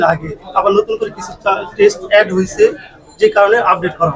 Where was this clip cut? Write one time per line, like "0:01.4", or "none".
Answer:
none